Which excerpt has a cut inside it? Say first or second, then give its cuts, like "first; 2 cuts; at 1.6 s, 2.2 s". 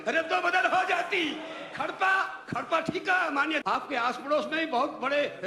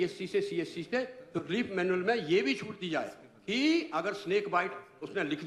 first; 1 cut; at 3.7 s